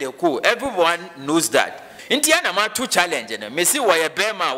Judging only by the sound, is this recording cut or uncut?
cut